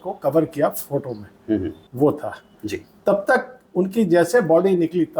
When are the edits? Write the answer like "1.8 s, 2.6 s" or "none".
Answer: 1.8 s